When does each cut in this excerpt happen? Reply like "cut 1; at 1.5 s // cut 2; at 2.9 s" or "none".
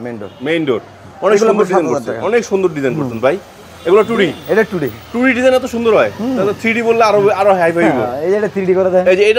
none

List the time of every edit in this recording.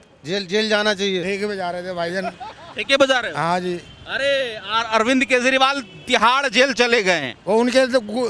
cut 1; at 1.2 s

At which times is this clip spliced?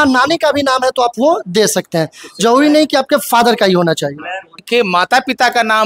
cut 1; at 4.6 s

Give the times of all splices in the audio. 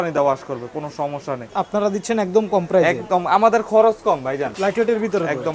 cut 1; at 1.5 s // cut 2; at 4.5 s

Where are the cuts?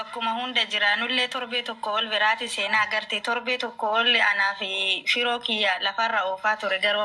none

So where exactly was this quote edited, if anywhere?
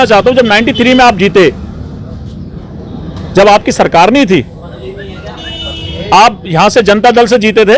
none

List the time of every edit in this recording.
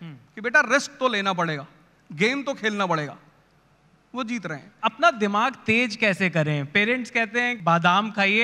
cut 1; at 4.7 s // cut 2; at 7.5 s

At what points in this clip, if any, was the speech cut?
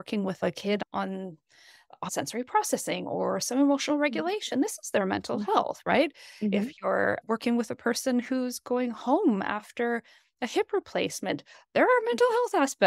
cut 1; at 2.1 s

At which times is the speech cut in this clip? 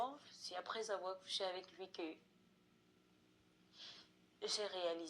none

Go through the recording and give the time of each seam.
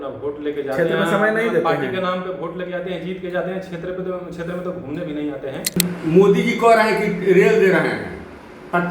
cut 1; at 5.8 s

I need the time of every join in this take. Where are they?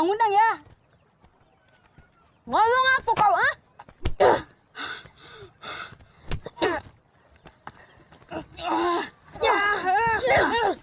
cut 1; at 9.2 s

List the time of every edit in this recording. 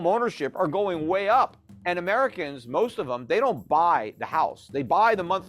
cut 1; at 1.7 s

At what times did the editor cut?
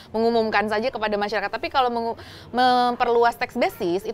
none

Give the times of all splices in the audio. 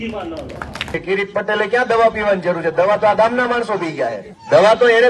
cut 1; at 1.0 s

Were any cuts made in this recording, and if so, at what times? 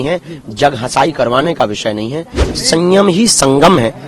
cut 1; at 2.5 s

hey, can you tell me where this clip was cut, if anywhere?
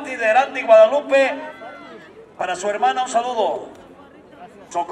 none

